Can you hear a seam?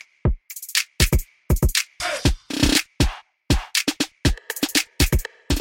yes; 1 cut; at 1.4 s

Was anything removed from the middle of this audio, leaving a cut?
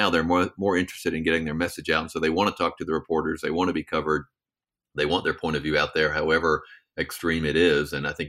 no; 0 cuts

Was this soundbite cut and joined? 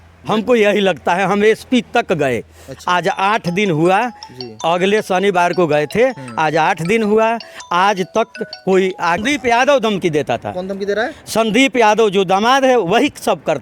yes; 1 cut; at 9.2 s

